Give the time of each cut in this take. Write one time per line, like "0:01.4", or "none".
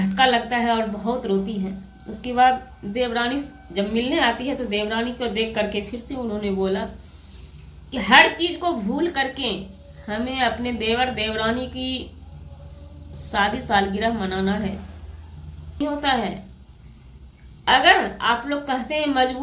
0:15.8